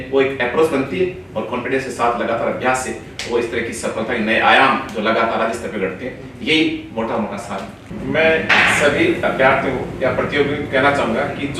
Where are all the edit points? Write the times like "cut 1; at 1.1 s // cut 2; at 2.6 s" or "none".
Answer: none